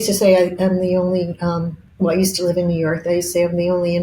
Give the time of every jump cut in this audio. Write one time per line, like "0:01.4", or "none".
0:01.8